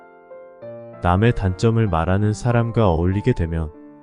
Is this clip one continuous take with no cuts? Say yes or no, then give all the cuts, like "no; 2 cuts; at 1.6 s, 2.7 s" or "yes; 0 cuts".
no; 1 cut; at 1.0 s